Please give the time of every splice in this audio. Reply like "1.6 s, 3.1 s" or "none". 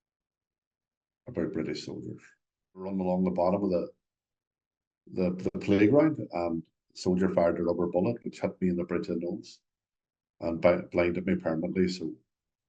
2.9 s